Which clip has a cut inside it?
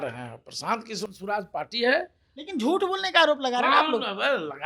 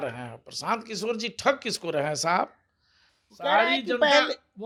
first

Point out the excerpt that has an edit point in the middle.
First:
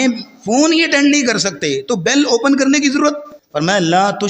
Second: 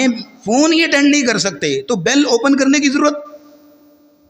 first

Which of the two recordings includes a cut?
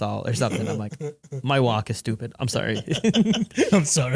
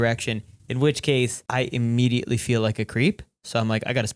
second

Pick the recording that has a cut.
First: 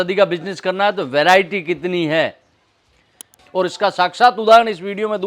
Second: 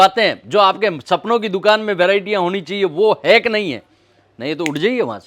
first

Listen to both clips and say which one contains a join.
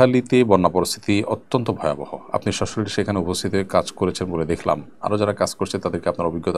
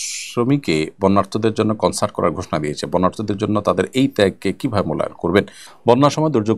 second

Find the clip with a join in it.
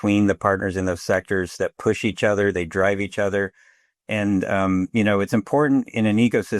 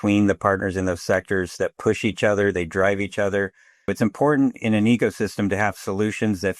second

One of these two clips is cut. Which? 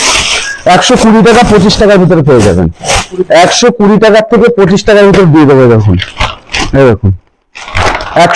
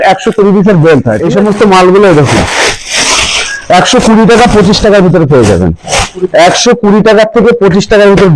second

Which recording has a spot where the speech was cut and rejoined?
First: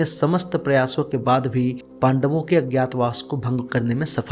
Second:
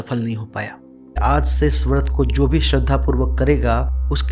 second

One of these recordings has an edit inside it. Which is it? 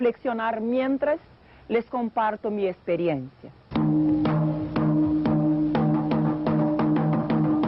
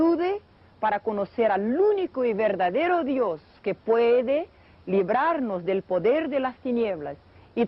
second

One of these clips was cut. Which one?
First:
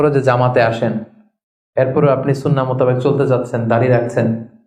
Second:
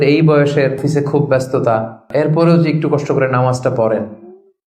second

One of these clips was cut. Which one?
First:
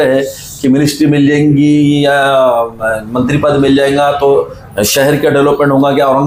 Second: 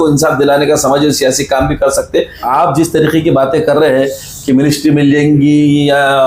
second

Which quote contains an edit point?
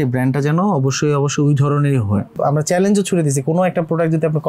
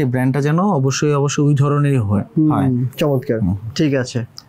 first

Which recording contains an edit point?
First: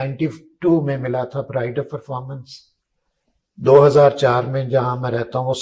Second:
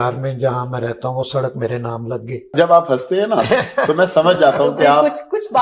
second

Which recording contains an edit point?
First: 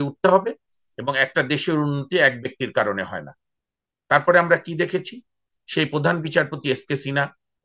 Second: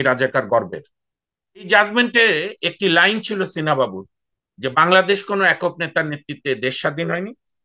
second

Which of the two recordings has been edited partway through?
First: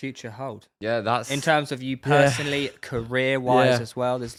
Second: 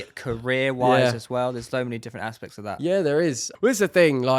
second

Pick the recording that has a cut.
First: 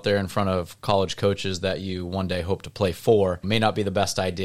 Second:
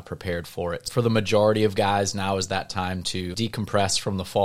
second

